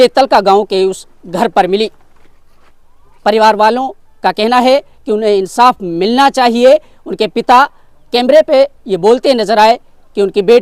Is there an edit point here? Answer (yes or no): no